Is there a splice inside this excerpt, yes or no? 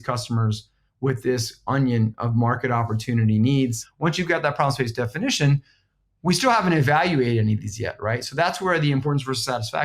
yes